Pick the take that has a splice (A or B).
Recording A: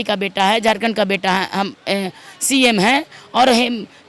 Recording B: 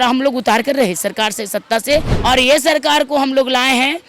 B